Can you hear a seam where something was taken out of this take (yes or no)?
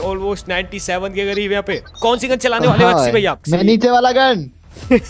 yes